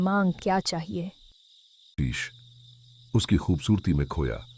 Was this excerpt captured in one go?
no; 1 cut; at 1.9 s

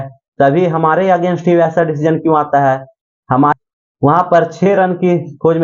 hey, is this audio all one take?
no; 1 cut; at 3.5 s

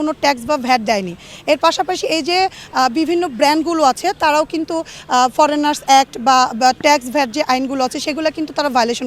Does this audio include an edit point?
no; 0 cuts

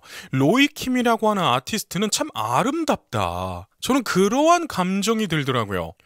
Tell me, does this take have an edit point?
no; 0 cuts

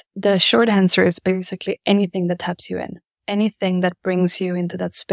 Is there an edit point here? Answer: no; 0 cuts

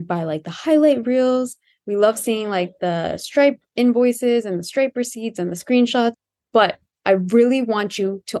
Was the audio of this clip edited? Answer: no; 0 cuts

